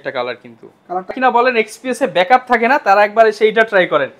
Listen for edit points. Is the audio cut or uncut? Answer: cut